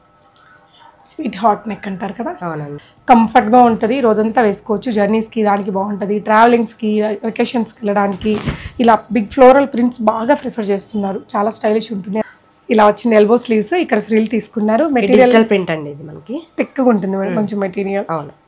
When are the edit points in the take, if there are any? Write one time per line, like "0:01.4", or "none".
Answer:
0:02.8
0:12.2